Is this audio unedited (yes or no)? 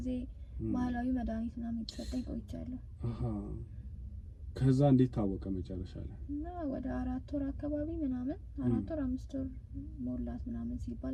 yes